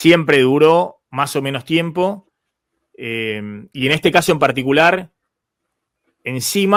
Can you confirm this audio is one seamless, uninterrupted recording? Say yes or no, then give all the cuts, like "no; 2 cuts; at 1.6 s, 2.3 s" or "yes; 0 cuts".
yes; 0 cuts